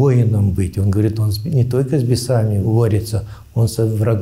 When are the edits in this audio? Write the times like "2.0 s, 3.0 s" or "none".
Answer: 2.6 s